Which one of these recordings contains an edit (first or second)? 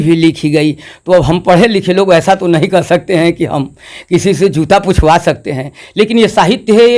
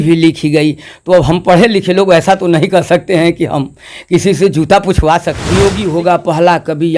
second